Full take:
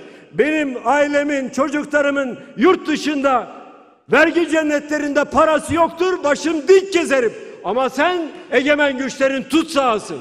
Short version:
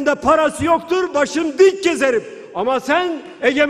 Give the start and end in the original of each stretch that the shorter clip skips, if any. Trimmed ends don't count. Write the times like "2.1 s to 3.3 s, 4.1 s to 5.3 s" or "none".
none

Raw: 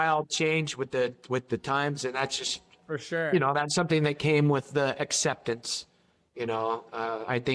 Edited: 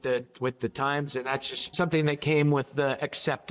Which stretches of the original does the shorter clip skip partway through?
2.6 s to 3.7 s

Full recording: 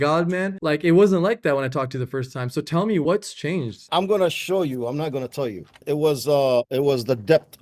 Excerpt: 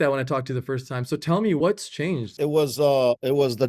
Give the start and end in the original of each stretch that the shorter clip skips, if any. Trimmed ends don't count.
3.7 s to 5.8 s

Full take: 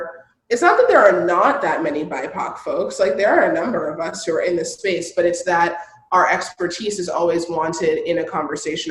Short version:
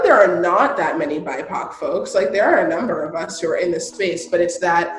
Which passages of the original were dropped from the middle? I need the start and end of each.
none

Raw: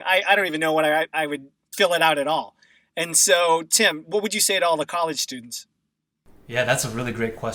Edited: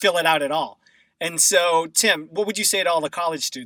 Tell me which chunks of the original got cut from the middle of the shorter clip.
none

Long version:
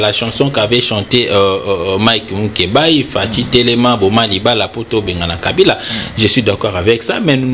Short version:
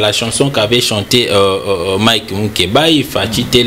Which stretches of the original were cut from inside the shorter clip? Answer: none

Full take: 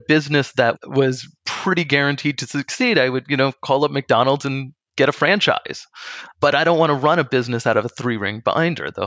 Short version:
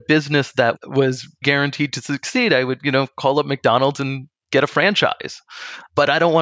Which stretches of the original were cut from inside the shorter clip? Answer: 1.4 s to 1.9 s

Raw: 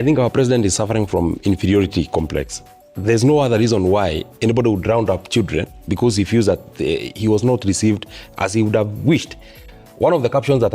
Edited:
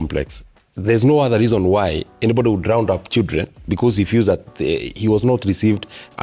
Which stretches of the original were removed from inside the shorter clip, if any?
none

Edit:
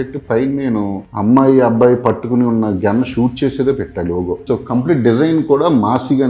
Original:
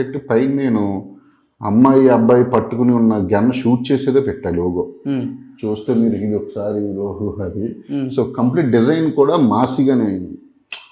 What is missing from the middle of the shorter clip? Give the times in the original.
1.0 s to 1.5 s, 4.9 s to 8.1 s

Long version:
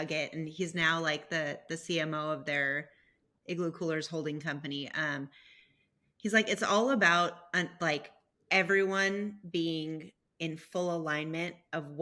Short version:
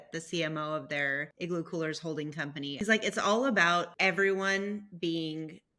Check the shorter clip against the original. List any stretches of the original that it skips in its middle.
2.8 s to 3.4 s, 4.8 s to 6.2 s, 7.4 s to 8.4 s

